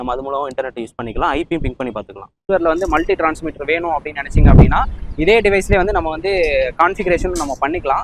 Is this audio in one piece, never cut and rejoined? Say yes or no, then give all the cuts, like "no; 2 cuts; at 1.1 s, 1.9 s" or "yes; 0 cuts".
no; 1 cut; at 2.4 s